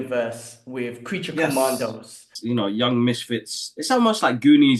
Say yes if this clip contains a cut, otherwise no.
yes